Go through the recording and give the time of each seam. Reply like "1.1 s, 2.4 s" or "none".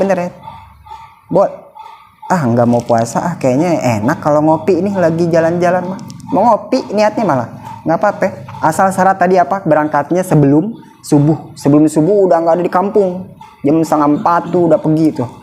none